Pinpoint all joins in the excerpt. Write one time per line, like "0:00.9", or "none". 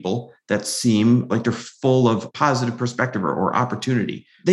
0:01.3
0:02.3